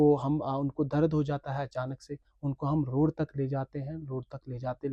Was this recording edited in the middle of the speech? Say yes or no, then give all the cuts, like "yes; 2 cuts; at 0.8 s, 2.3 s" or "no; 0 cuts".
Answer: no; 0 cuts